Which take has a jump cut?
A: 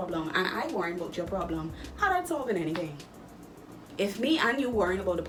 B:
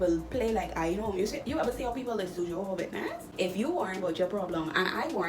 B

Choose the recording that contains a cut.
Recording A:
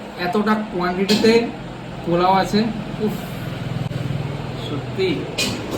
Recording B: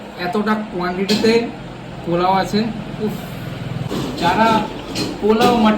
B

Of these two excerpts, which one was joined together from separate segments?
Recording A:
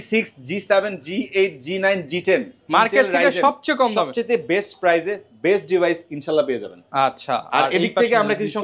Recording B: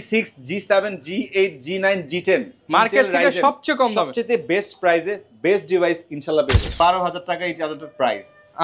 B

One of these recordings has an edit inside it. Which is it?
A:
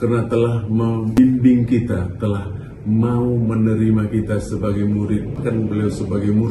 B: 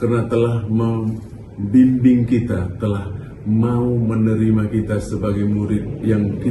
A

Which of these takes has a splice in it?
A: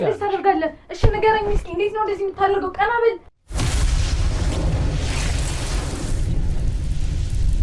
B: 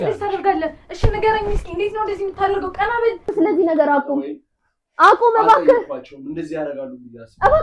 B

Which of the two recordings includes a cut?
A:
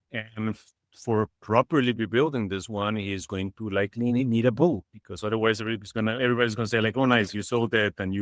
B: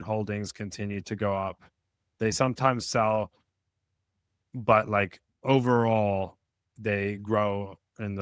B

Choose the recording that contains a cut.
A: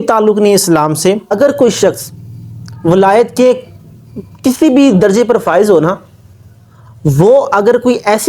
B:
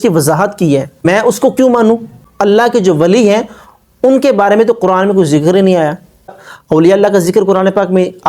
B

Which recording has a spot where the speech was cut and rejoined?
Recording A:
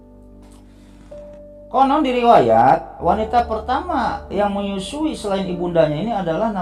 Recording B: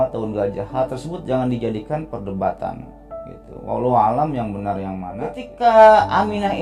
B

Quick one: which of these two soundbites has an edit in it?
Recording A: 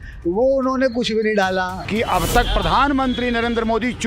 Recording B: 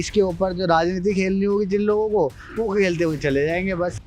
A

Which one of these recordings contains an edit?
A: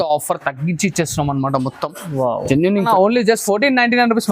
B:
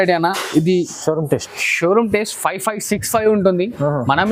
A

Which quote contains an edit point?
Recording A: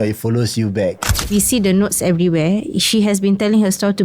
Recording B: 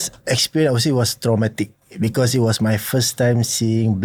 A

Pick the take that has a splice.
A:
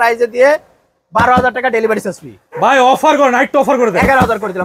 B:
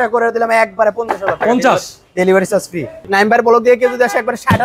B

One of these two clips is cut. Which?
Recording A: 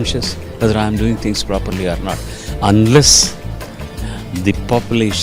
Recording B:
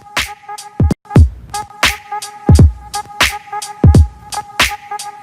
B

